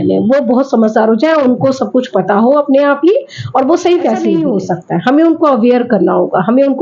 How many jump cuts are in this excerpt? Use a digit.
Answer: 1